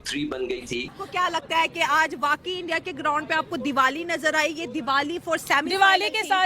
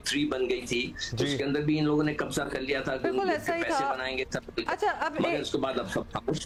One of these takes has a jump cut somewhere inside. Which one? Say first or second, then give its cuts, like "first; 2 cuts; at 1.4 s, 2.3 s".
first; 1 cut; at 1.0 s